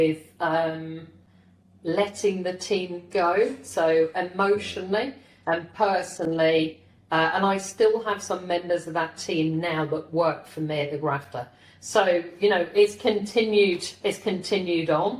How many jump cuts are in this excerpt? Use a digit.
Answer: 0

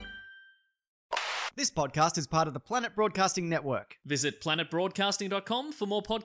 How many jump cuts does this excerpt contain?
1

